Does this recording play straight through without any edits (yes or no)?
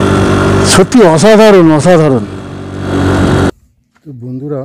no